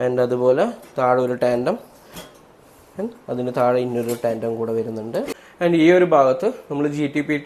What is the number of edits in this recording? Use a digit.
1